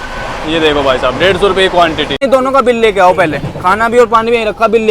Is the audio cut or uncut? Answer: cut